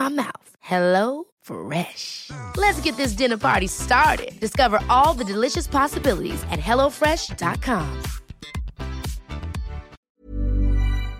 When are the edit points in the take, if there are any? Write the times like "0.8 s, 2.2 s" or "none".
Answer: 10.0 s